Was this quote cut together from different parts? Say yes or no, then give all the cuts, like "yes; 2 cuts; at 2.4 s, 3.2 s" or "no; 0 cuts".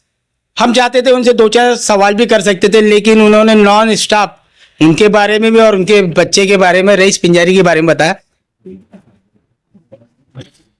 yes; 1 cut; at 8.3 s